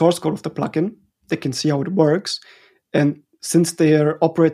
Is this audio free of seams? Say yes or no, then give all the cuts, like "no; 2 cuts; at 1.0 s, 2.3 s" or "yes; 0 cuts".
yes; 0 cuts